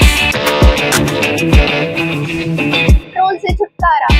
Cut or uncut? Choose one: cut